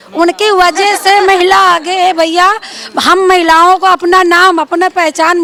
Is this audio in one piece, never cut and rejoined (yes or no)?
yes